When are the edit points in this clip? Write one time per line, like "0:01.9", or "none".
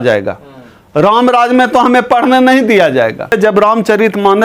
0:03.3